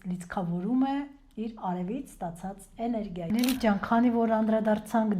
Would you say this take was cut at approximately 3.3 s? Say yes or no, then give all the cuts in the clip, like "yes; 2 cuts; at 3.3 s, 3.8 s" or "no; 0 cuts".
yes; 1 cut; at 3.3 s